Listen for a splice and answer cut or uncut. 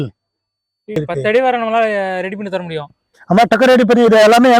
cut